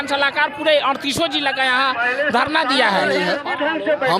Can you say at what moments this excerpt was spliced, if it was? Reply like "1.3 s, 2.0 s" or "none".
3.1 s